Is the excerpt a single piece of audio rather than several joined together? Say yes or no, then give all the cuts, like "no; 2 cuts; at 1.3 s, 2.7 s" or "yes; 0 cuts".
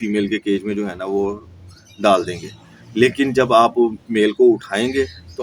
yes; 0 cuts